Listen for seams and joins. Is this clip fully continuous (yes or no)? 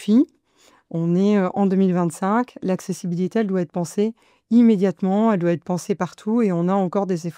yes